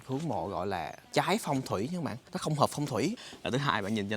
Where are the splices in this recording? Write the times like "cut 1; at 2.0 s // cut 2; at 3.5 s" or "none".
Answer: cut 1; at 1.0 s // cut 2; at 2.2 s // cut 3; at 3.3 s